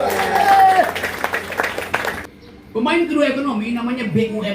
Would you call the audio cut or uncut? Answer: cut